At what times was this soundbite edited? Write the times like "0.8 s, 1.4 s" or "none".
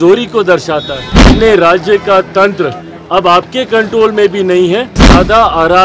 1.3 s, 5.1 s